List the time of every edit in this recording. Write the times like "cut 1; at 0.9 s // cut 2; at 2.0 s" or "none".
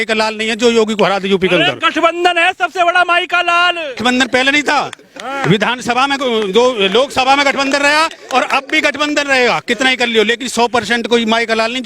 cut 1; at 4.0 s